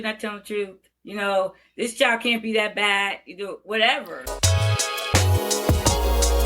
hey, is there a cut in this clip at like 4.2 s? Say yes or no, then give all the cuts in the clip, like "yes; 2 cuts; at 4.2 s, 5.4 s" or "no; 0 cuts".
yes; 1 cut; at 4.2 s